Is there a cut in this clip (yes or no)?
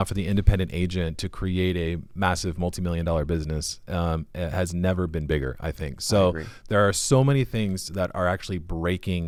no